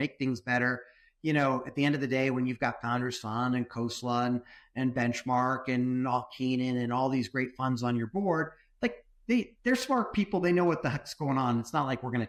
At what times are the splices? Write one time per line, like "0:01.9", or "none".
none